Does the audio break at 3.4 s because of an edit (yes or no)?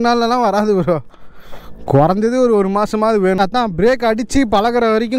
yes